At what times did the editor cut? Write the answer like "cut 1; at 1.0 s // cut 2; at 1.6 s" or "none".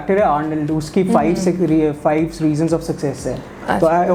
none